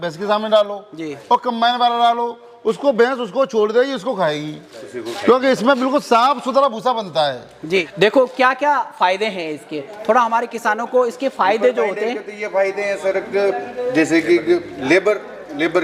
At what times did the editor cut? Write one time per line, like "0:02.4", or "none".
0:07.9